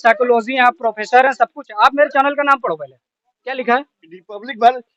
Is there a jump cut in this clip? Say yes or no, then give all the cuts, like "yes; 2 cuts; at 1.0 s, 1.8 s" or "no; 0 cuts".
no; 0 cuts